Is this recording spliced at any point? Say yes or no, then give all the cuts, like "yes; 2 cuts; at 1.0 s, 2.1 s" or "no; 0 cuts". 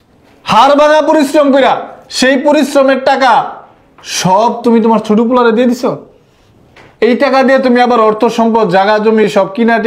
no; 0 cuts